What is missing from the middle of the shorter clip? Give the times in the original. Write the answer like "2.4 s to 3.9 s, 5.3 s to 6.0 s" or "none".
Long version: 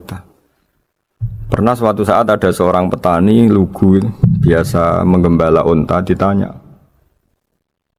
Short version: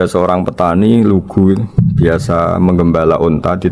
none

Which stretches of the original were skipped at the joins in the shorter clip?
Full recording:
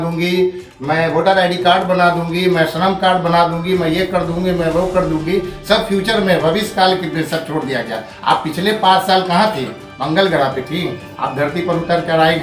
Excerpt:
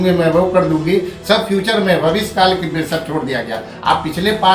none

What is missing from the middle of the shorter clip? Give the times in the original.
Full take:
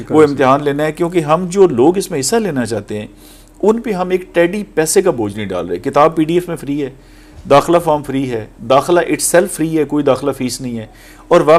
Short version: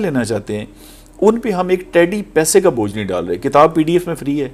none

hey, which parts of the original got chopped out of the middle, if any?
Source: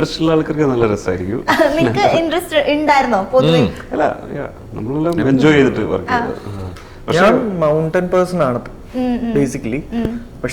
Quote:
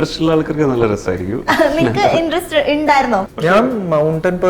3.3 s to 7.0 s

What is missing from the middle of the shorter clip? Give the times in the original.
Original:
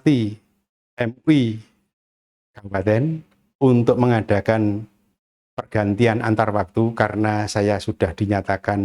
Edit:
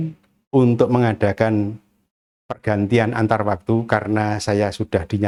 none

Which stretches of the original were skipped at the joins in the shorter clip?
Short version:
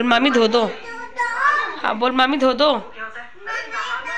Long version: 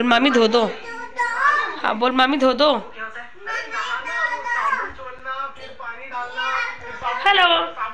none

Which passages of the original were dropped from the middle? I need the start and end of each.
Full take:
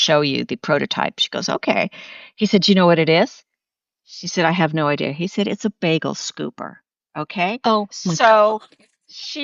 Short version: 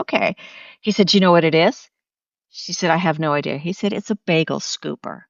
none

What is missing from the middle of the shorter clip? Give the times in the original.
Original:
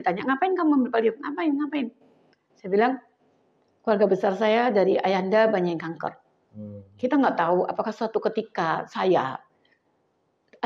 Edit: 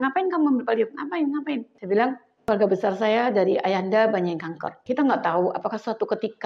2.0 s to 2.5 s, 3.1 s to 3.7 s, 6.1 s to 6.8 s

